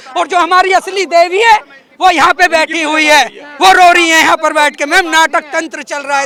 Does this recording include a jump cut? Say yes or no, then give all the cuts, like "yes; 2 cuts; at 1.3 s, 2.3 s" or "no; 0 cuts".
no; 0 cuts